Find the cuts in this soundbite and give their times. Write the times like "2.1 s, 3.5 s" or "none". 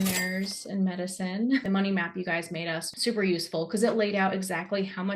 1.6 s